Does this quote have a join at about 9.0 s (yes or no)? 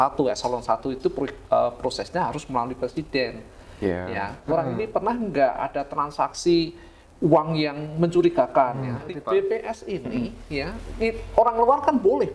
yes